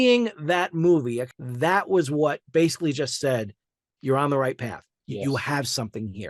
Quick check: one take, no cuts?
no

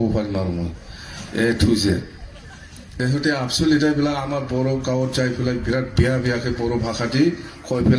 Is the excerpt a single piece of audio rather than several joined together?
no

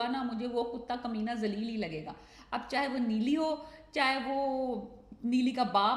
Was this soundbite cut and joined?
no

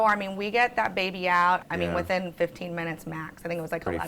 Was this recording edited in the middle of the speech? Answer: yes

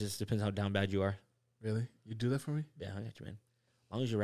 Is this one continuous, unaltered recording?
yes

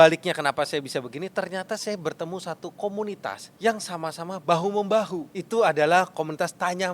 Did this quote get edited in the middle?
yes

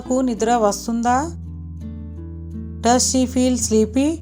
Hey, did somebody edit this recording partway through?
no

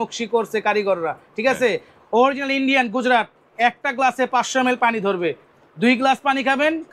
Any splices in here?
no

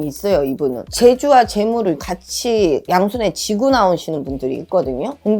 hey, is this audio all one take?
yes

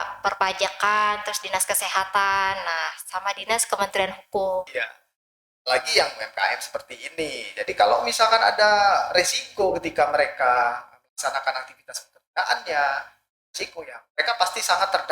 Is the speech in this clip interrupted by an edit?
yes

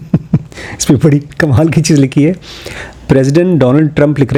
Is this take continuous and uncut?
yes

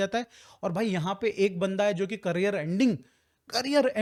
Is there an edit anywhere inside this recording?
no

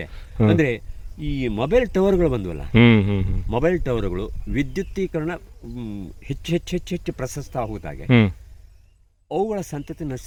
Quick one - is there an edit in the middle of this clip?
no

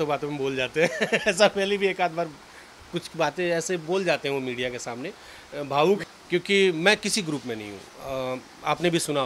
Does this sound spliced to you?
yes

